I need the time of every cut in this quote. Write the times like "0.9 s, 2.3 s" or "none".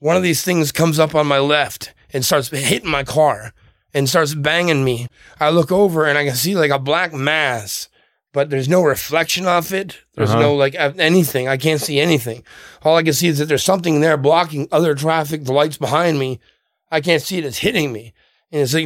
5.1 s